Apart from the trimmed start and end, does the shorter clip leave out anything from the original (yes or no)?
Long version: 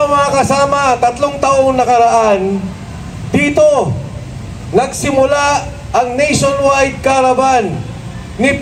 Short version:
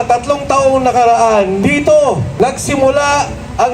yes